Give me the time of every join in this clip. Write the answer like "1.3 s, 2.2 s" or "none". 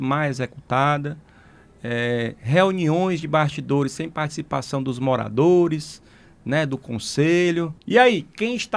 7.8 s

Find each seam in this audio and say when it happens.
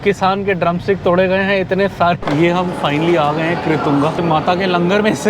2.2 s, 4.2 s

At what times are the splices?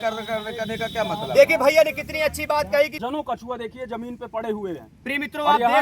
3.0 s

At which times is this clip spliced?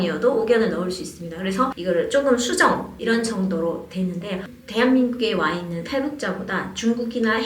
4.5 s

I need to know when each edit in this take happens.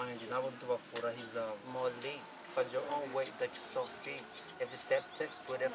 1.6 s

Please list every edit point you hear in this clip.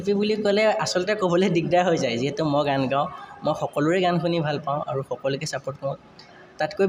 none

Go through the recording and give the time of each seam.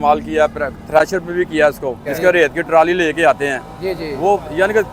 2.1 s

